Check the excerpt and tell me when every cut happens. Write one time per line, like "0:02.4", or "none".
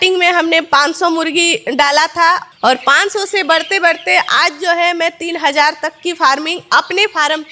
0:02.5